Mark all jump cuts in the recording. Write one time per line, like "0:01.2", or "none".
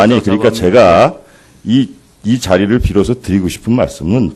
none